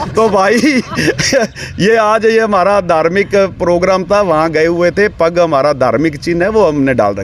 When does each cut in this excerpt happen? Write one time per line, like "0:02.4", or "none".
none